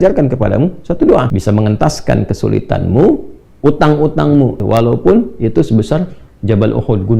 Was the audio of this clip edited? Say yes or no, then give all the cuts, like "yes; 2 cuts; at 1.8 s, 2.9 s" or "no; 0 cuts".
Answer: yes; 2 cuts; at 1.3 s, 4.6 s